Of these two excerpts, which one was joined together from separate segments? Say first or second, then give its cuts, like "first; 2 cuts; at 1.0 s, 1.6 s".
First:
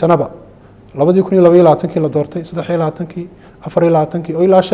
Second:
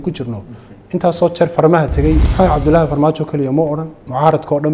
second; 1 cut; at 2.3 s